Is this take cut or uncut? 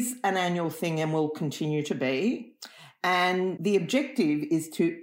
cut